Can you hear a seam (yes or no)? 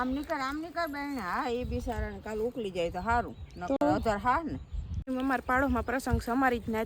yes